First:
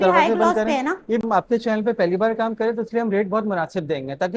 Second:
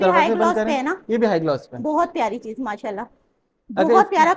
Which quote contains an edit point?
first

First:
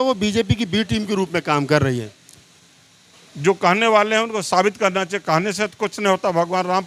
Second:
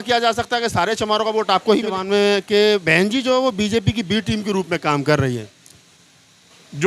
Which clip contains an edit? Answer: second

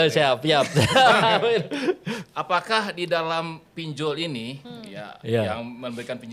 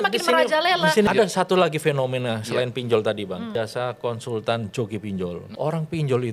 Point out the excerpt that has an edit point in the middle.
second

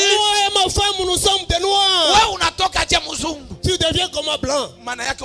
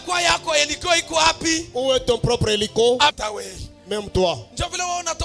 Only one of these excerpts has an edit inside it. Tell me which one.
second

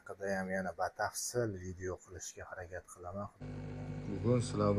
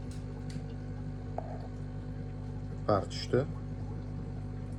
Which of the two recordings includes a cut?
first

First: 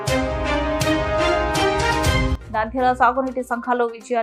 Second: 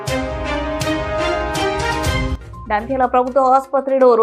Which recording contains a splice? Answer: second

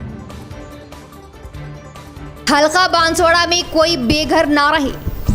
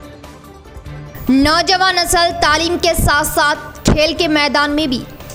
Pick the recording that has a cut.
first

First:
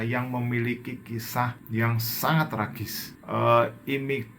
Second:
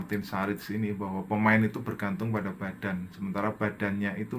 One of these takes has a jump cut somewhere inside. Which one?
first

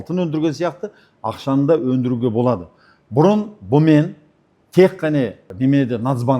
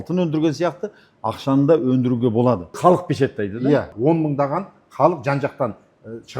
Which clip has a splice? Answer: second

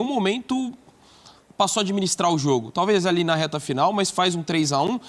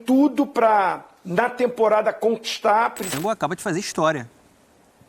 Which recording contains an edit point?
second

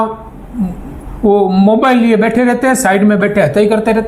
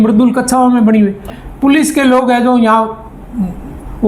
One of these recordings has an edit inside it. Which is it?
second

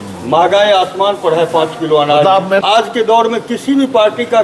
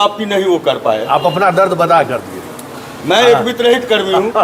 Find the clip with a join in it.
first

